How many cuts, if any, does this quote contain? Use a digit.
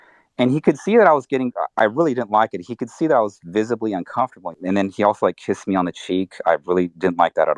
1